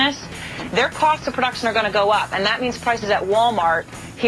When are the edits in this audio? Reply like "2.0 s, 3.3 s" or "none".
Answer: none

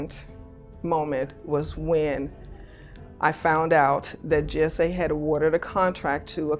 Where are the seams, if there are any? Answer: none

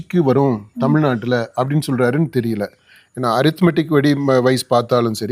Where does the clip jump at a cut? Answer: none

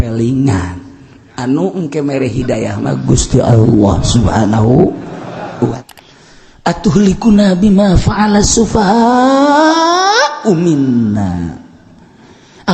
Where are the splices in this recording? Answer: 5.8 s

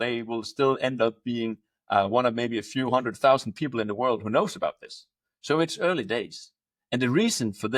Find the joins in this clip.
none

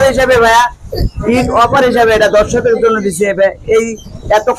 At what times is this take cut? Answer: none

